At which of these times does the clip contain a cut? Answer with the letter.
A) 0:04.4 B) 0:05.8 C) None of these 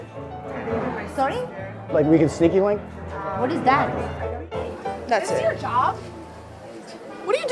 A